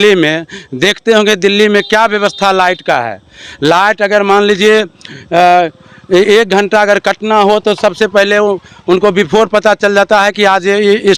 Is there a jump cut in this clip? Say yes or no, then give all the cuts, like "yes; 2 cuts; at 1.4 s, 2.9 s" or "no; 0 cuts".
no; 0 cuts